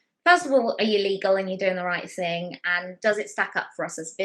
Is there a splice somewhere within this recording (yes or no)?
no